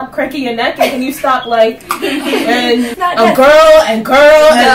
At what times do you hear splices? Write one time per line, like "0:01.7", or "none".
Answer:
0:02.9